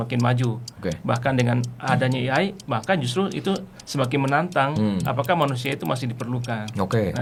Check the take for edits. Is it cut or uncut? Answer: uncut